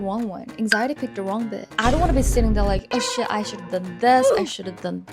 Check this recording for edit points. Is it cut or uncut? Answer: cut